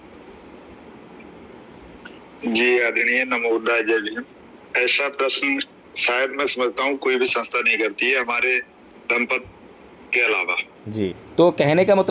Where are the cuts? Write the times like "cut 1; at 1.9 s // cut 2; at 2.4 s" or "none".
cut 1; at 10.9 s